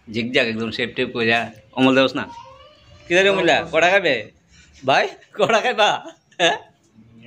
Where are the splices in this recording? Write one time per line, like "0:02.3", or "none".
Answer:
0:02.6